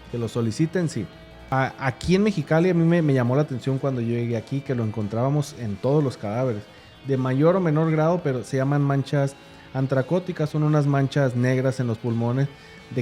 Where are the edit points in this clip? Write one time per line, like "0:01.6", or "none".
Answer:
0:01.3